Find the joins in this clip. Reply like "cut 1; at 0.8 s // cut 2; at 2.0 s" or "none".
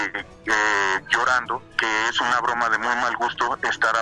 cut 1; at 1.7 s